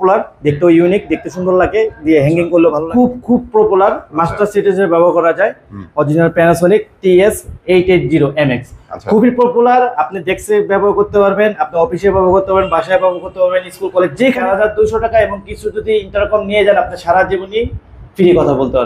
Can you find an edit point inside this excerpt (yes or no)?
yes